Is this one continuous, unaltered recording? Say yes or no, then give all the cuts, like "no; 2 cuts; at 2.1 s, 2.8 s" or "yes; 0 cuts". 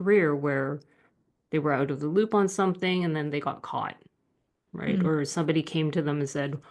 yes; 0 cuts